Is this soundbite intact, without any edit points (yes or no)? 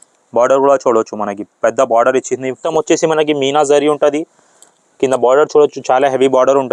no